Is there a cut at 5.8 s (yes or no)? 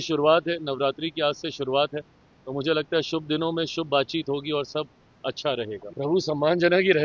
yes